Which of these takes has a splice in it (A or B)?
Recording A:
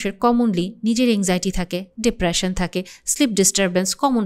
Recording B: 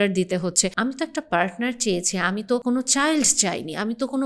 B